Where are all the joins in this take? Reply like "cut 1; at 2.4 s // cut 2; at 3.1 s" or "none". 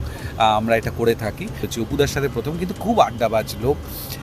cut 1; at 1.6 s